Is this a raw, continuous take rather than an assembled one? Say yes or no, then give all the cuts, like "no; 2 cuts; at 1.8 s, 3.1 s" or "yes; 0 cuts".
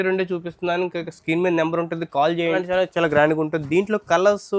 no; 1 cut; at 2.5 s